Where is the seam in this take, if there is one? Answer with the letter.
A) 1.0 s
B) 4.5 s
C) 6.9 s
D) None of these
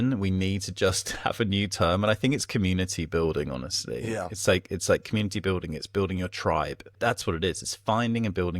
C